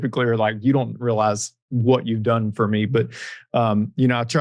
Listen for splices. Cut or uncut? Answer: uncut